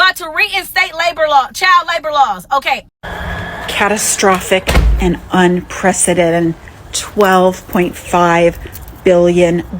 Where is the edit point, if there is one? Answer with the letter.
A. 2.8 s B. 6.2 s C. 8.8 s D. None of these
A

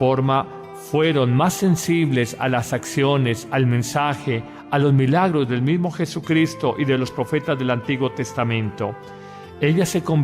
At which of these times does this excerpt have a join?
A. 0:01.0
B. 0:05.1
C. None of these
A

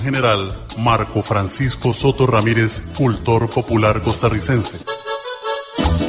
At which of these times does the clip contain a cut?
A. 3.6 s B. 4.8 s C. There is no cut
B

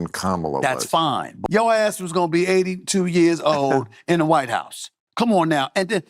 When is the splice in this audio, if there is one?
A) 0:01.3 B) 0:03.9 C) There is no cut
A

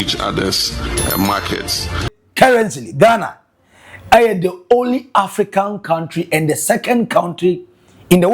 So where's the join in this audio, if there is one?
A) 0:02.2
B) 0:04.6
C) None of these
A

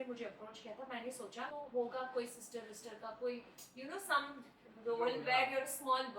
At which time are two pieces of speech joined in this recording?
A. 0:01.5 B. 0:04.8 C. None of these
A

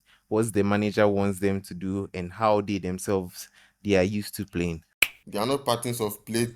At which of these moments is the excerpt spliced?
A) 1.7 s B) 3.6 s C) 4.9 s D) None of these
C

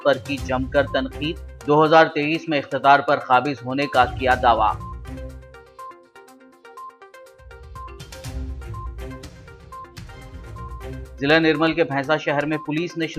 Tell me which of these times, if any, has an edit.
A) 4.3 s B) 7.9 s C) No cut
C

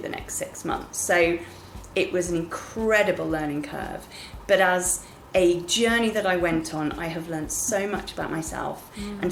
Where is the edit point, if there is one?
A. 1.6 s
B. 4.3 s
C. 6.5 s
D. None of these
D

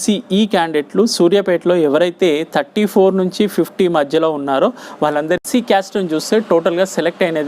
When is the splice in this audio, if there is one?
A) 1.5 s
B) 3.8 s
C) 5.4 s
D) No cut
C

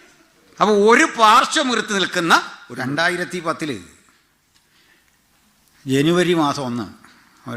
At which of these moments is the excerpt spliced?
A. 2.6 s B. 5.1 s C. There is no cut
A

